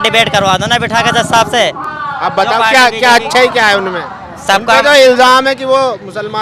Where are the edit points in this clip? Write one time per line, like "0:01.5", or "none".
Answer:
none